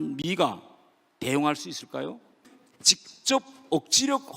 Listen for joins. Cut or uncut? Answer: cut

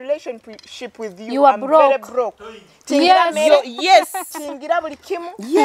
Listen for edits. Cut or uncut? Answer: uncut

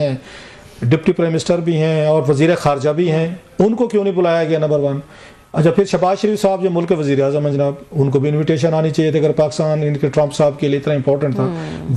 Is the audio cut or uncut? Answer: uncut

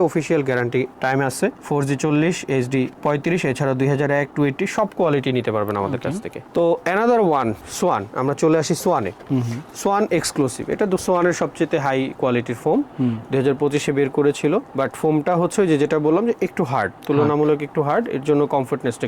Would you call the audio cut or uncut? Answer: uncut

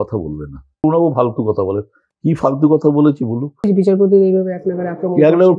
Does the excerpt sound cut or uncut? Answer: cut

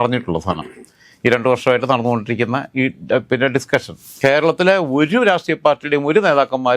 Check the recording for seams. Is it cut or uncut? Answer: cut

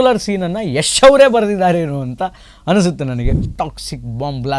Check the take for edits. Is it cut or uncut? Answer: cut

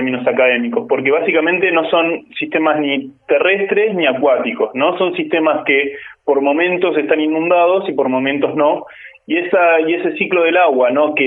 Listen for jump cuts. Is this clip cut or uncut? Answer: uncut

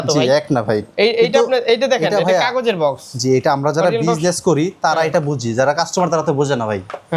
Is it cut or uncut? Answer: uncut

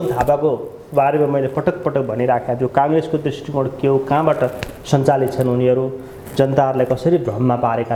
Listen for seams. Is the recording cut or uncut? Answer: uncut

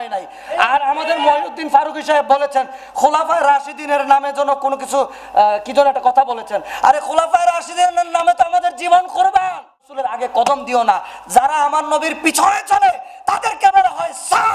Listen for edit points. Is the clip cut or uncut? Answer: cut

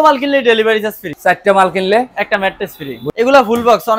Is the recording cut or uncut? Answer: cut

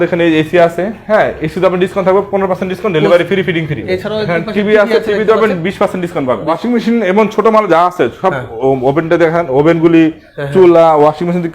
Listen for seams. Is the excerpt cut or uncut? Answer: cut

